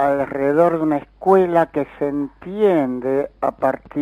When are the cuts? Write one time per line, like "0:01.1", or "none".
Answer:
0:02.5